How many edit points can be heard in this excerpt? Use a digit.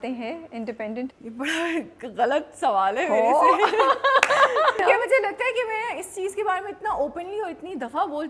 1